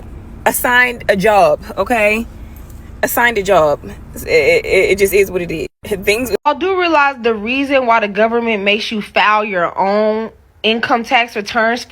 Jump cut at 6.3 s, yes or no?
yes